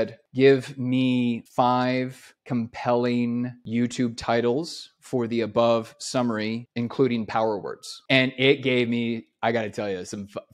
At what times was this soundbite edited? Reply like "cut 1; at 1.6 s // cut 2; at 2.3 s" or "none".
cut 1; at 3.6 s